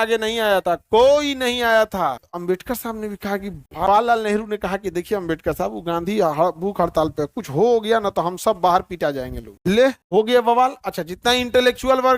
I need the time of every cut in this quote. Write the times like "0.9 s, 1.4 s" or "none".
2.3 s, 3.9 s, 9.5 s